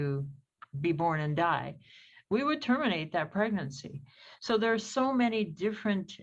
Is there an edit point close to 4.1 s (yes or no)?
no